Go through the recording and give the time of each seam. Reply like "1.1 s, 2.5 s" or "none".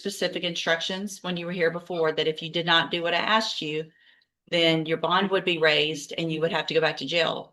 none